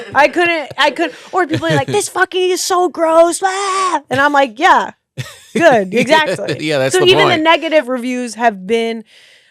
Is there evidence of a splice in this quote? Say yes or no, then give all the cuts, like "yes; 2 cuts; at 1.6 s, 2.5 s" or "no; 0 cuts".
yes; 1 cut; at 7.8 s